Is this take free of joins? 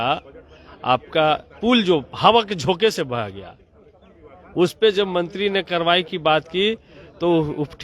yes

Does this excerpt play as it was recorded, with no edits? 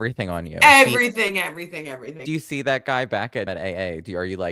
no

